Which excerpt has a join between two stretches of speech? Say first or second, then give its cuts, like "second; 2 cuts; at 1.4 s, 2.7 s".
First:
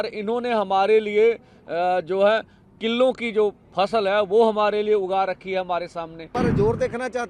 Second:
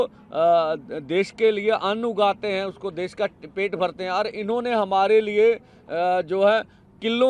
first; 1 cut; at 6.3 s